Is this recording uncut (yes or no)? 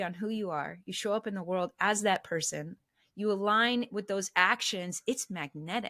yes